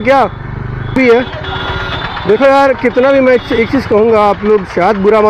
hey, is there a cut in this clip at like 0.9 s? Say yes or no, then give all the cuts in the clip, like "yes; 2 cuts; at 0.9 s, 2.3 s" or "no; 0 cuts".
yes; 1 cut; at 0.9 s